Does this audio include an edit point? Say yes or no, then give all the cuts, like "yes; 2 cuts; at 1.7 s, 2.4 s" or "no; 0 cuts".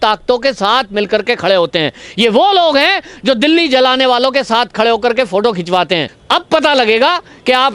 yes; 1 cut; at 6.1 s